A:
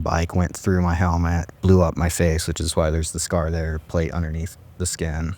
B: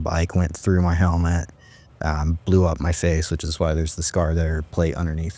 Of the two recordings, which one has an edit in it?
A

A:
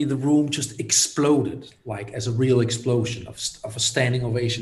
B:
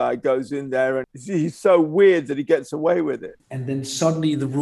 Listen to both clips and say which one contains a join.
B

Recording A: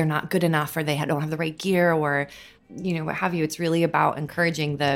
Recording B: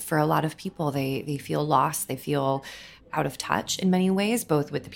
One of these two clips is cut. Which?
B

